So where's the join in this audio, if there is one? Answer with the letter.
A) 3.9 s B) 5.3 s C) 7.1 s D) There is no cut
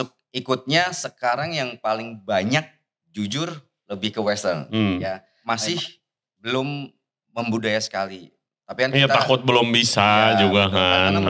B